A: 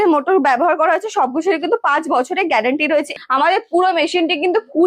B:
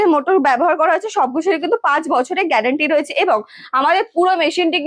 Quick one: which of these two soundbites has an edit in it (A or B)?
A